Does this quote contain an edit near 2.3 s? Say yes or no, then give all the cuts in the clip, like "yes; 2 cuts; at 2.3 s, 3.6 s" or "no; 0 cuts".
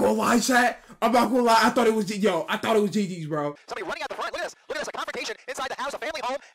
no; 1 cut; at 3.7 s